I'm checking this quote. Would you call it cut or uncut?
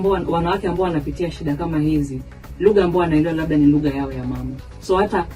uncut